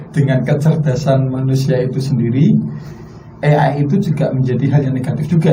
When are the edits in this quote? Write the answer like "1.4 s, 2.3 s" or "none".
none